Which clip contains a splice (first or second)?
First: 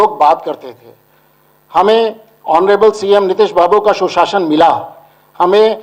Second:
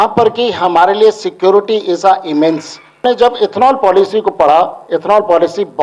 second